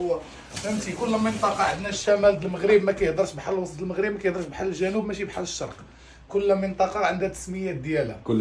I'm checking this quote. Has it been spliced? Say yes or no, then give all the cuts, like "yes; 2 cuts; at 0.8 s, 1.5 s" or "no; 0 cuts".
no; 0 cuts